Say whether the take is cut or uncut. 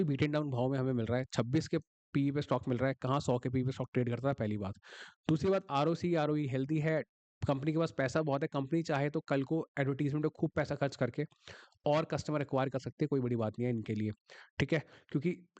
uncut